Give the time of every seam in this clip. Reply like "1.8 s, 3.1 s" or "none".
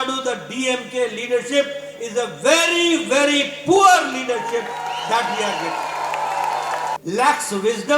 7.0 s